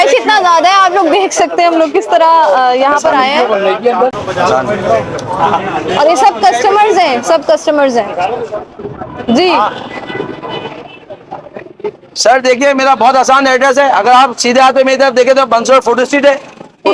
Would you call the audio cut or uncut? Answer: uncut